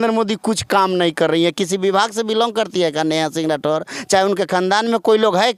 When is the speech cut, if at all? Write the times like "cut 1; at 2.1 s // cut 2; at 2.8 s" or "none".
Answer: none